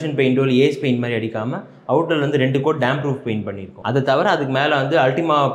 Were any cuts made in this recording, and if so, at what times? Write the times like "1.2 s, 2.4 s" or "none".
3.7 s